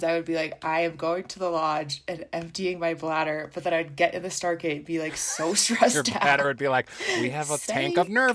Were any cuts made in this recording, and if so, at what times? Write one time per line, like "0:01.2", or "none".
none